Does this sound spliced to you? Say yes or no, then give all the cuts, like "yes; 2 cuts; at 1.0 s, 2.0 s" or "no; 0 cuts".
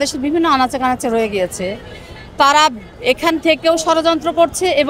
no; 0 cuts